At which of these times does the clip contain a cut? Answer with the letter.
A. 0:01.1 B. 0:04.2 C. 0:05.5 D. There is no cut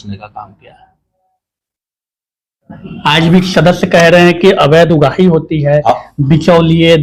D